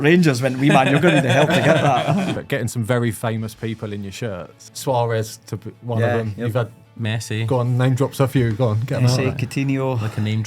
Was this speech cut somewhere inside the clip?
yes; 2 cuts; at 2.4 s, 4.6 s

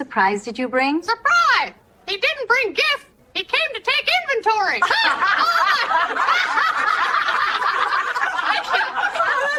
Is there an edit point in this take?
no; 0 cuts

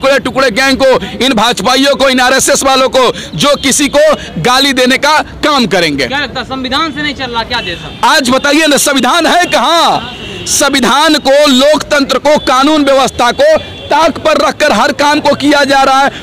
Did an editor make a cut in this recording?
no; 0 cuts

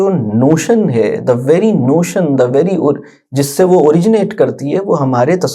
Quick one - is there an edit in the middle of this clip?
no; 0 cuts

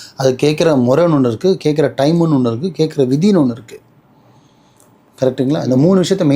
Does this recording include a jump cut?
no; 0 cuts

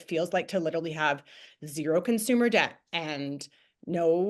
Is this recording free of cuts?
yes; 0 cuts

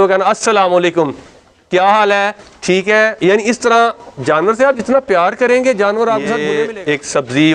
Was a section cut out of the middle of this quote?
yes; 1 cut; at 6.5 s

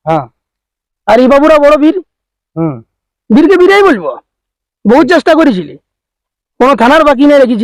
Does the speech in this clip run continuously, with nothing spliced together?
yes; 0 cuts

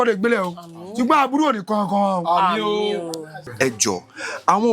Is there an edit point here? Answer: yes; 1 cut; at 3.3 s

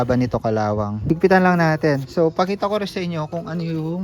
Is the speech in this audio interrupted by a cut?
yes; 1 cut; at 0.9 s

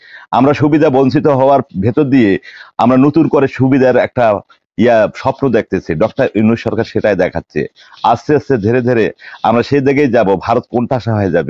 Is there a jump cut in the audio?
no; 0 cuts

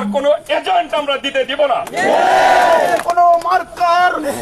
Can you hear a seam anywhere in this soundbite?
yes; 1 cut; at 3.1 s

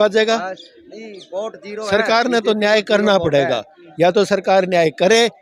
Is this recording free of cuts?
yes; 0 cuts

